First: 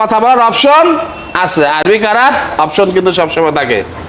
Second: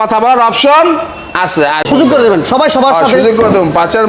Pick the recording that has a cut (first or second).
second